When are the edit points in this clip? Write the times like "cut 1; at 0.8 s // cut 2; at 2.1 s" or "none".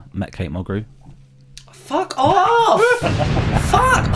none

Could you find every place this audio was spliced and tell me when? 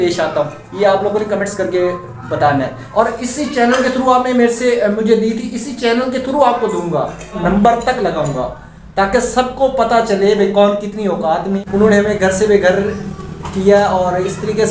cut 1; at 2.8 s // cut 2; at 7.4 s // cut 3; at 11.6 s

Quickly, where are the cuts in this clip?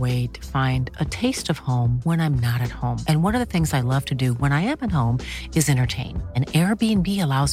none

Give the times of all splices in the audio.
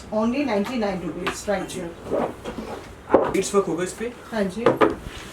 cut 1; at 3.3 s

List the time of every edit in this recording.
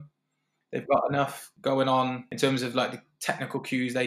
cut 1; at 1.4 s // cut 2; at 2.3 s

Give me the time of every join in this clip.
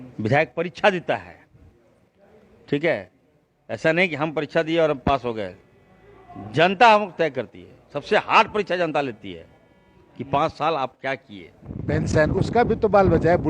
cut 1; at 11.8 s

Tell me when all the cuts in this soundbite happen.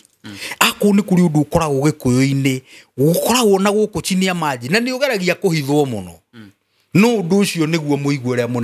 none

